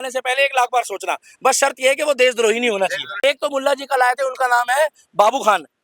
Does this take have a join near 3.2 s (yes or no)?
yes